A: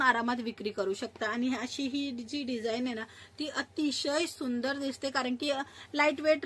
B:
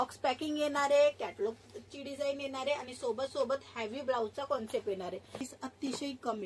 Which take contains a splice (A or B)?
B